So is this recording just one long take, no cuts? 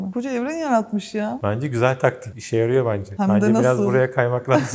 yes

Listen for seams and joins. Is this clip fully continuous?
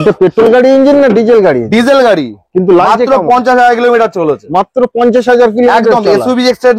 yes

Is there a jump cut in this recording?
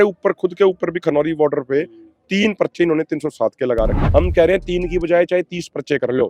yes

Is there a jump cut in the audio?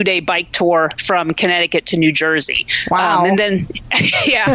no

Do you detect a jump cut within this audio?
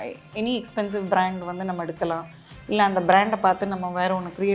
no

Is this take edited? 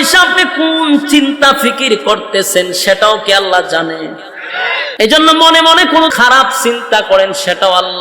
yes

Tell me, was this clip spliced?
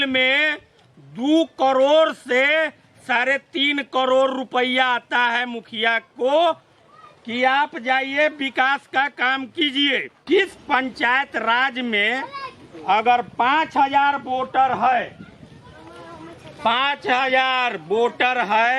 yes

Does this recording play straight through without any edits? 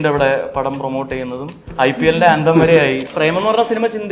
no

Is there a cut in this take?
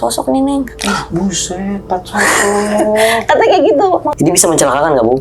yes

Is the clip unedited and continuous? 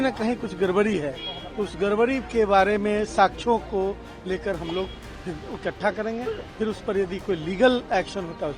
yes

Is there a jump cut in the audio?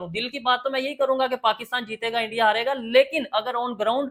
no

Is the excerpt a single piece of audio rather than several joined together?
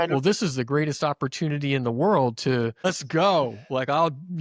no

